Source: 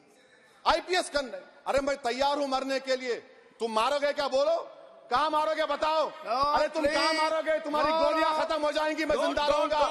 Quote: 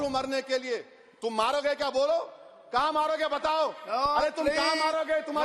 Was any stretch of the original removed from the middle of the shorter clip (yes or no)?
no